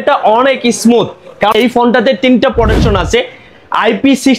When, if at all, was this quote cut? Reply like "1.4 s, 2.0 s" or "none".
1.5 s